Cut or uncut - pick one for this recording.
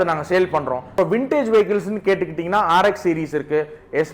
cut